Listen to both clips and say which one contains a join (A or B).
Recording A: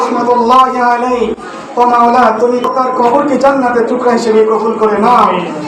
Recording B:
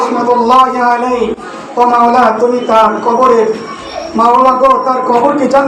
A